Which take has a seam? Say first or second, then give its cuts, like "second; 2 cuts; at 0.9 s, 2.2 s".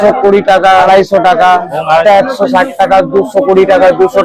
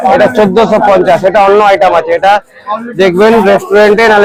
first; 2 cuts; at 0.8 s, 2.0 s